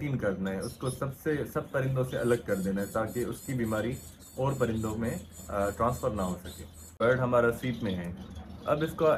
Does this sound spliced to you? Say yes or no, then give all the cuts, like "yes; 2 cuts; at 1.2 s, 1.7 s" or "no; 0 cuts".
yes; 1 cut; at 6.9 s